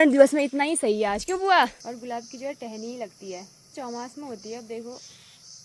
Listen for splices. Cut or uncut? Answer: cut